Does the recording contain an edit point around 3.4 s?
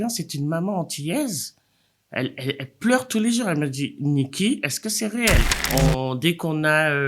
no; 1 cut; at 5.6 s

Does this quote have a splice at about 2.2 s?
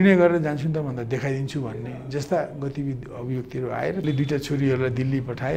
no; 1 cut; at 4.0 s

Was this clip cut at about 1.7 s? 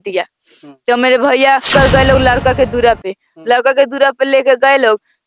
yes; 1 cut; at 1.7 s

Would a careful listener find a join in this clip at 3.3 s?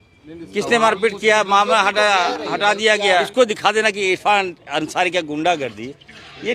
yes; 1 cut; at 3.3 s

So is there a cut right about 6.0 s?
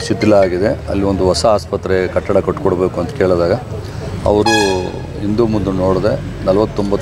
no; 0 cuts

